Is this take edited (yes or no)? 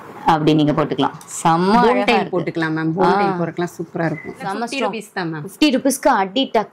yes